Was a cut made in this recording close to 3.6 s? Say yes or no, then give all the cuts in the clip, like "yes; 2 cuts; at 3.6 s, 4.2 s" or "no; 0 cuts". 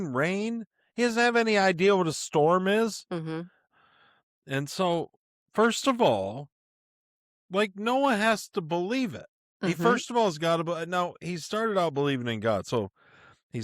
yes; 1 cut; at 3.6 s